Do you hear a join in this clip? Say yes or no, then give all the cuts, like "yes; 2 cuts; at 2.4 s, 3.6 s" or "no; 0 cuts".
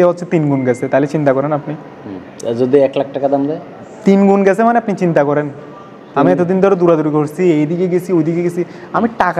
no; 0 cuts